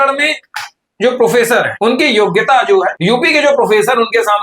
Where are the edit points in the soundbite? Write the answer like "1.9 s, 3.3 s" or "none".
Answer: 1.7 s, 3.0 s